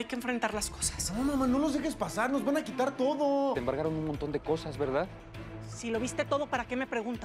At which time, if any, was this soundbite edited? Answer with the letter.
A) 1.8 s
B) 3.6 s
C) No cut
B